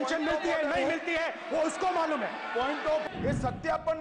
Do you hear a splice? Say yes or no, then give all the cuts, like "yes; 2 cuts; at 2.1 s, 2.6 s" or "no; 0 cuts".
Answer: yes; 1 cut; at 3.0 s